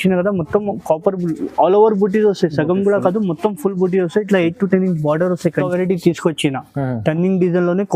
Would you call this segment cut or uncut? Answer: cut